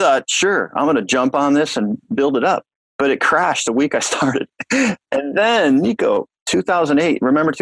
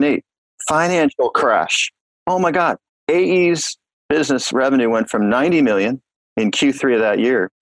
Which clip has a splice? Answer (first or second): second